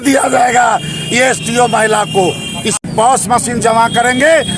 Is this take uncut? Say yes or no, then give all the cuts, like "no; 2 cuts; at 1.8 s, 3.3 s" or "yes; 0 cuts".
no; 1 cut; at 2.8 s